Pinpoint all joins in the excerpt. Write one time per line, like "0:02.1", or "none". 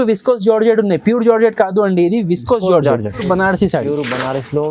0:03.2